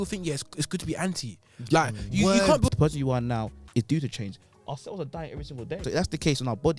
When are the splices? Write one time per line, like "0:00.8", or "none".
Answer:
0:02.7
0:05.8

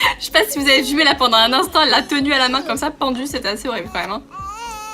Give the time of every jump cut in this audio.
0:01.0

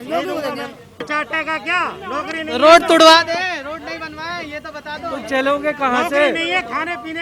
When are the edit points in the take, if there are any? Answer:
0:01.0

